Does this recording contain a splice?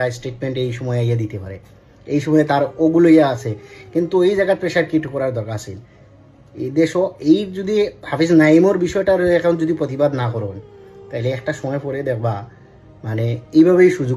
no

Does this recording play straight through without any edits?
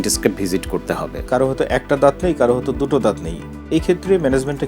no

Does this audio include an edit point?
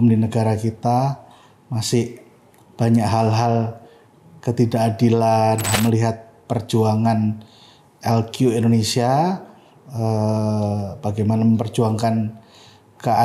yes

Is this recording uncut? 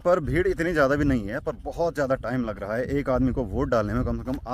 yes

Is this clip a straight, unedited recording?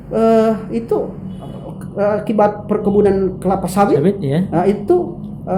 yes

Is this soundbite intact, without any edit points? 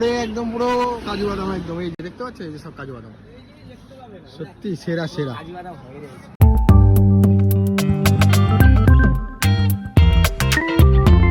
yes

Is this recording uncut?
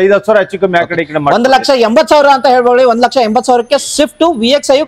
yes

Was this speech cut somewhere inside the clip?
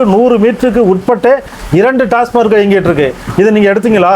no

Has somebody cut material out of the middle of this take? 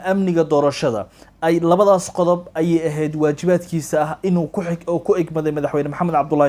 no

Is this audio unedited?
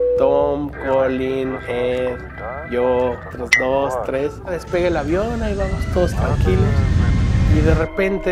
yes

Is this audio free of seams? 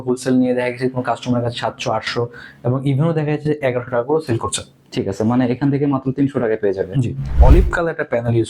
no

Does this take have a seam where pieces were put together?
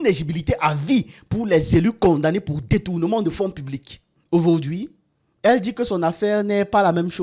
no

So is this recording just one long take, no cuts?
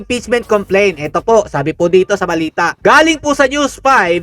yes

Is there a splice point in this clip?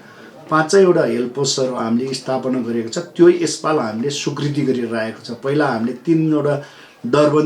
no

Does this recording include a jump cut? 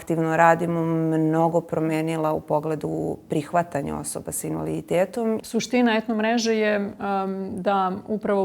yes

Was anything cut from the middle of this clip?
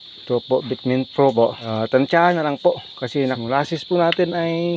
yes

